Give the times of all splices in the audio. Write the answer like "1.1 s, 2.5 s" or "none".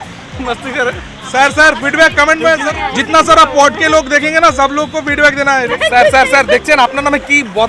5.7 s